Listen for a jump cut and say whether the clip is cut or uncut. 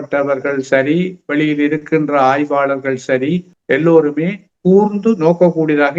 uncut